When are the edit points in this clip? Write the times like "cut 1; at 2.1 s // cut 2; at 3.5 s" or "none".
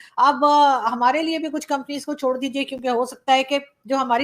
none